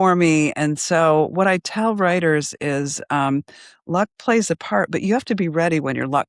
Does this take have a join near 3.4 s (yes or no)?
no